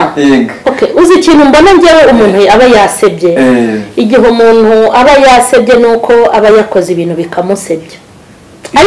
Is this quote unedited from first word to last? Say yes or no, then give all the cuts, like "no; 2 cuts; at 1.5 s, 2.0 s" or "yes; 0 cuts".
yes; 0 cuts